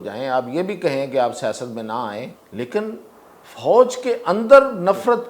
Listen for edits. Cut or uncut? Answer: cut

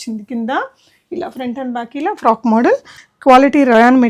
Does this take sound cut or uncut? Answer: cut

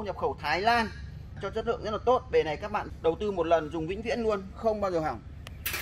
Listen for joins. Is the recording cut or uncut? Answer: cut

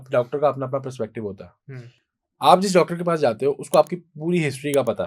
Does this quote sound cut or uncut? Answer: uncut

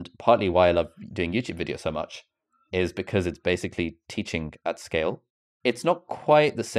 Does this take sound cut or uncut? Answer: uncut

